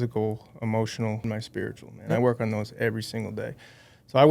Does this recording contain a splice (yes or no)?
yes